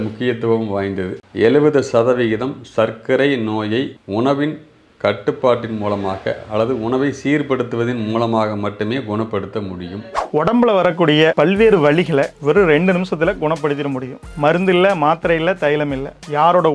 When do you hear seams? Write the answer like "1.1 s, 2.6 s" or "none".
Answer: 1.2 s, 10.1 s